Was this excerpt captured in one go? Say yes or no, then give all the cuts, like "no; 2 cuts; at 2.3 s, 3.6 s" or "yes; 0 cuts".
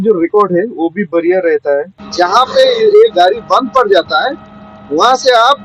no; 1 cut; at 2.0 s